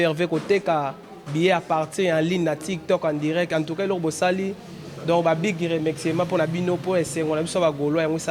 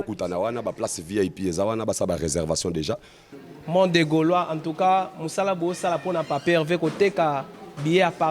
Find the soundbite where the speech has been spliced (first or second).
second